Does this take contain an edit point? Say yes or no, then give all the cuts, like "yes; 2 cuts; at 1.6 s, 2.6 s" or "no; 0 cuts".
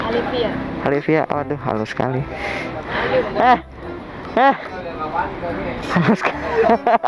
no; 0 cuts